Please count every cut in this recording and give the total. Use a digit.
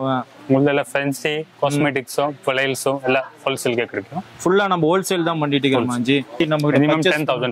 1